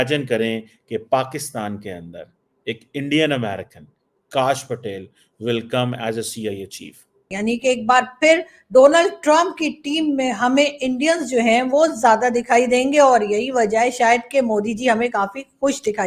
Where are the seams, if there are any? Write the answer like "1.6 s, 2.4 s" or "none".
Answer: 7.3 s